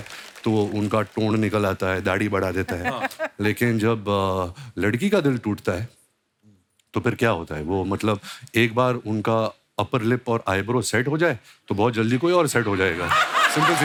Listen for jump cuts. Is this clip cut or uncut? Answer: uncut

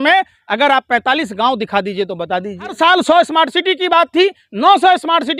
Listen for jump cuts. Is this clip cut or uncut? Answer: cut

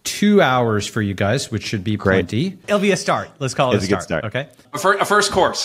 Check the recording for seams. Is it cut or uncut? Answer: cut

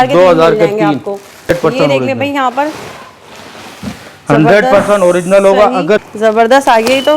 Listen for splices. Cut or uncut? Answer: cut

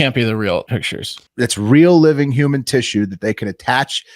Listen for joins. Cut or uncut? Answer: cut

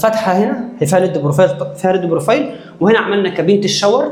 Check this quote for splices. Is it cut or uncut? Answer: uncut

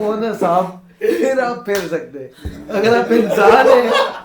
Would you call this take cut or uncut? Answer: uncut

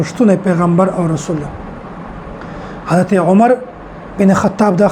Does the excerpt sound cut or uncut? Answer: uncut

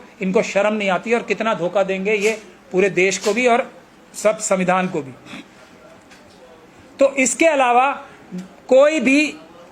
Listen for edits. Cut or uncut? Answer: uncut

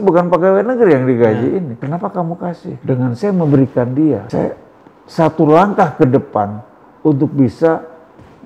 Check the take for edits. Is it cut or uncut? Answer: cut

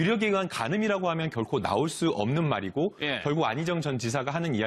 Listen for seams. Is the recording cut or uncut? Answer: cut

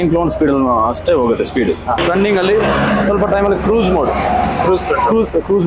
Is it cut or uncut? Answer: cut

